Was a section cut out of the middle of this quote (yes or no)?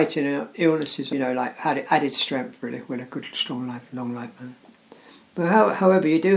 yes